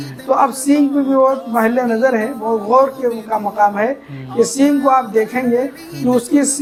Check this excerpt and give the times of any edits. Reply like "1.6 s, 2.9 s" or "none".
none